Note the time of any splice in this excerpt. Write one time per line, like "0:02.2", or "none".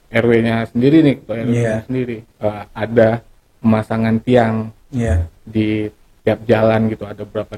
0:02.2